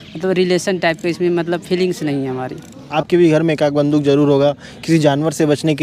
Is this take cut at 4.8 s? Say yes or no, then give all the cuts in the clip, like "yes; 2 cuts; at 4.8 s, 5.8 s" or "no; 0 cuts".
no; 1 cut; at 2.8 s